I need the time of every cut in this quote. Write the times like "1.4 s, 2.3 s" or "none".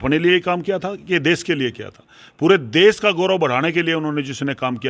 none